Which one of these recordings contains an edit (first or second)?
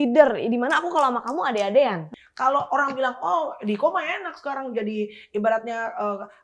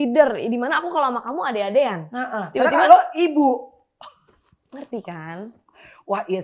first